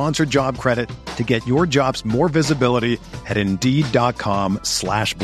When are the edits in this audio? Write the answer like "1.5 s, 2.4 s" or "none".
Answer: none